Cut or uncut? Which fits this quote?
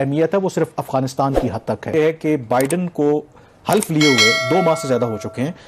cut